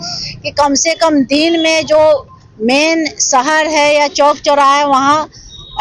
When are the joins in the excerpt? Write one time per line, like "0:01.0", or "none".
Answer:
none